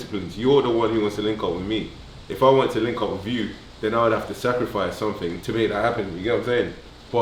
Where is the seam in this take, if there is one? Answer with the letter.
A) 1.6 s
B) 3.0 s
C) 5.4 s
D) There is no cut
C